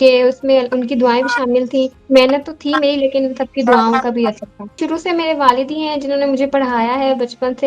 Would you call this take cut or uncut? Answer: cut